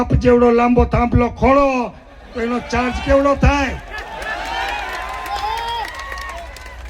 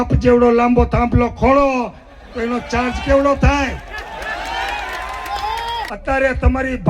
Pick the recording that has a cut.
second; 1 cut; at 5.9 s

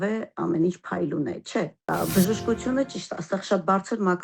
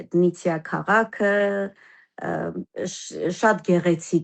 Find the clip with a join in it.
first; 1 cut; at 1.9 s

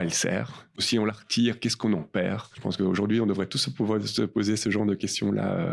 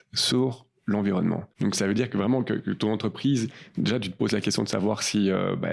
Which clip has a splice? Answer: first; 1 cut; at 2.5 s

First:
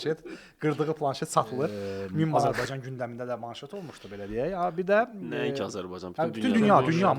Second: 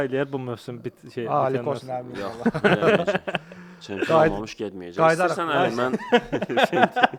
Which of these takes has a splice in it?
first; 1 cut; at 2.5 s

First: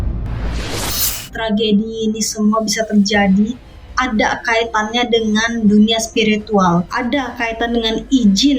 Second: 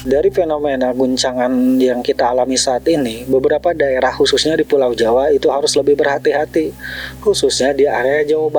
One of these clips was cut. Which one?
first; 2 cuts; at 1.2 s, 6.9 s

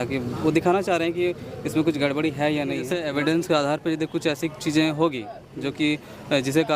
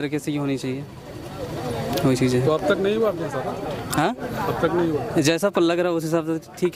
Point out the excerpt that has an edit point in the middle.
first; 1 cut; at 2.9 s

